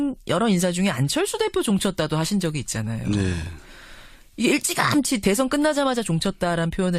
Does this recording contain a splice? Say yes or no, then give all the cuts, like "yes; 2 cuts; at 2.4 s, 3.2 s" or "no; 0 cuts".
yes; 1 cut; at 2.3 s